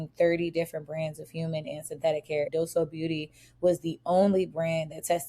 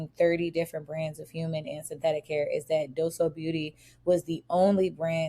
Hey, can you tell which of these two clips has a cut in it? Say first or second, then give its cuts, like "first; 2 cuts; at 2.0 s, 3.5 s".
first; 1 cut; at 2.5 s